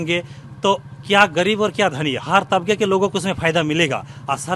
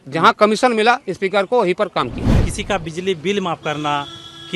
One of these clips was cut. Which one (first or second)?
second